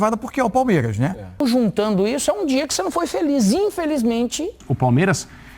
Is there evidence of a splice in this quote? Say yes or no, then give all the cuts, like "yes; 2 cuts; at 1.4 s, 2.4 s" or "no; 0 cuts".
yes; 2 cuts; at 1.4 s, 4.6 s